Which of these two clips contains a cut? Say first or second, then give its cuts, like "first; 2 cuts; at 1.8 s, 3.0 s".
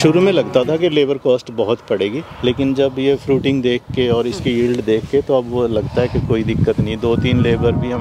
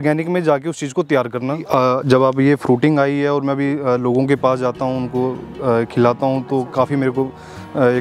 second; 1 cut; at 1.6 s